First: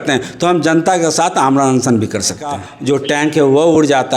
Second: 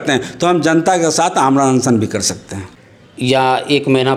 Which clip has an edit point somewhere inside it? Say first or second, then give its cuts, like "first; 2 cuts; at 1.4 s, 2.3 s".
first; 1 cut; at 2.7 s